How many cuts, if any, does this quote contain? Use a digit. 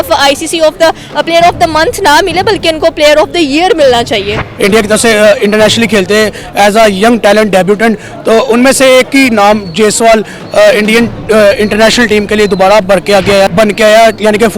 2